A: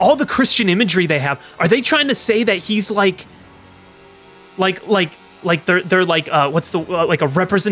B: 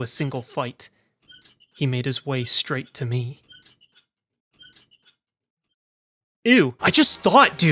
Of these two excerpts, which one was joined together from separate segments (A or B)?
B